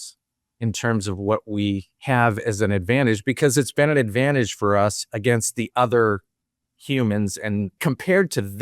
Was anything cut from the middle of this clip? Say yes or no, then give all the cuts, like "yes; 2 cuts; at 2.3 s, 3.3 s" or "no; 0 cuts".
yes; 2 cuts; at 1.9 s, 7.8 s